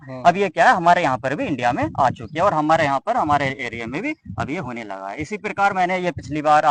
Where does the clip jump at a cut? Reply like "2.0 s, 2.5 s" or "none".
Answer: none